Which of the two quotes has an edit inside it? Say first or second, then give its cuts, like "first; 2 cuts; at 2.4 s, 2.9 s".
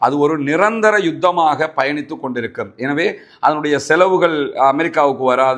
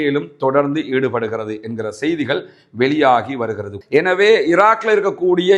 second; 1 cut; at 3.7 s